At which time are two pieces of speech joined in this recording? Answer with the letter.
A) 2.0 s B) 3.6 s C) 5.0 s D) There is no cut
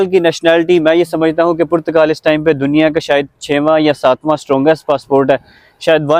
D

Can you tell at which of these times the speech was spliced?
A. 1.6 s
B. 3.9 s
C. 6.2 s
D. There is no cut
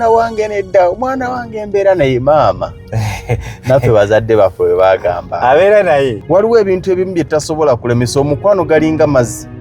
C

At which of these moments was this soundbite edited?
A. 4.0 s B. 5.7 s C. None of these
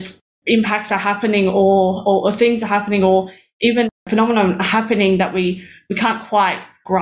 A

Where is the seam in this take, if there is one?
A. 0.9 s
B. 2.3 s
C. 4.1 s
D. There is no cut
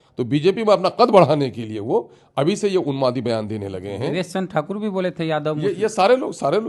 D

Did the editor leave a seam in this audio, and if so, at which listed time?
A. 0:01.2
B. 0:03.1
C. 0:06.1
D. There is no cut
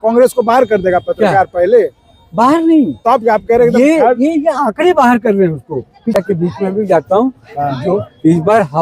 C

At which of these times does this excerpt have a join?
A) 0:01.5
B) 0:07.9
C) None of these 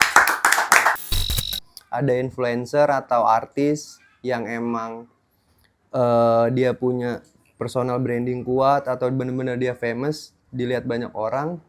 A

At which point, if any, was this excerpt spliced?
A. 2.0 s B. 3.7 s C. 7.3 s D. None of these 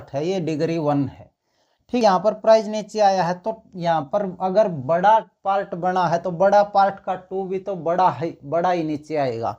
A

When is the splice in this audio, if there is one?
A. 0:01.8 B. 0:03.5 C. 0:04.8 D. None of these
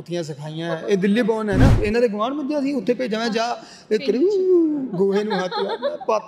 A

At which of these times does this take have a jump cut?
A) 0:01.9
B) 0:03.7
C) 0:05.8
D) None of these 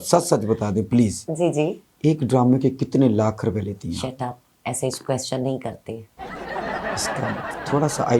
D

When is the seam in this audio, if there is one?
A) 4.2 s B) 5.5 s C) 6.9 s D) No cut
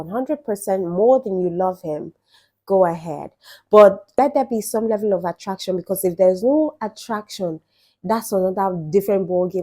A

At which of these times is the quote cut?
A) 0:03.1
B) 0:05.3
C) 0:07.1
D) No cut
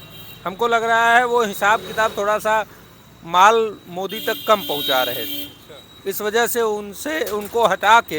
D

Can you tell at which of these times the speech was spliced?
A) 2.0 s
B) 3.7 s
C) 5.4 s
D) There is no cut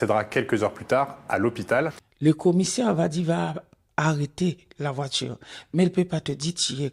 A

